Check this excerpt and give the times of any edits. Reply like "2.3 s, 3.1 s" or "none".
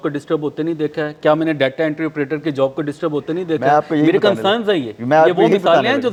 none